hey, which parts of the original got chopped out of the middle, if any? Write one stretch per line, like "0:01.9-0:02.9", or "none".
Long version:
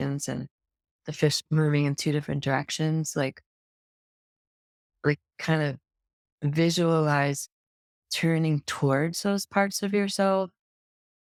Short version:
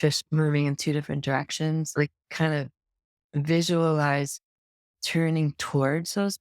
0:03.1-0:05.0